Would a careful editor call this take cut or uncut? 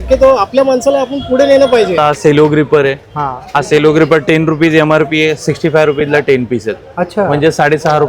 cut